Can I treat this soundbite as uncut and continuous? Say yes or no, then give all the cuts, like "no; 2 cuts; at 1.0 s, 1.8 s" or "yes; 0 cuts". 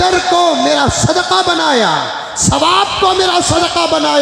yes; 0 cuts